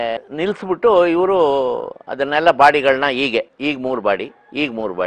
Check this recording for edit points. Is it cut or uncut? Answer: uncut